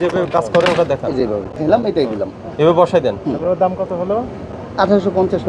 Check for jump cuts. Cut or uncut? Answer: cut